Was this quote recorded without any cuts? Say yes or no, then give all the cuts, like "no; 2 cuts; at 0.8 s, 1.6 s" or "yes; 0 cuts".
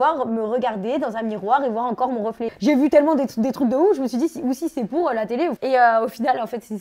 no; 2 cuts; at 2.5 s, 5.6 s